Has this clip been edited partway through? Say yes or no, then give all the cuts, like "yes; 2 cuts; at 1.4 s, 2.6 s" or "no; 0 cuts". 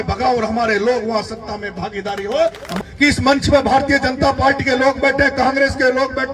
yes; 1 cut; at 2.8 s